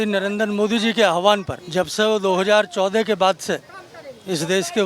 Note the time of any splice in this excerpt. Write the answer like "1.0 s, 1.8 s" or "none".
1.6 s